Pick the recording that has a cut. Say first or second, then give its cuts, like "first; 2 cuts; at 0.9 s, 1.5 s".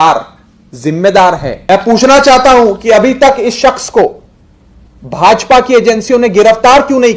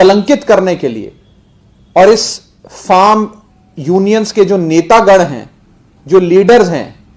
first; 1 cut; at 1.6 s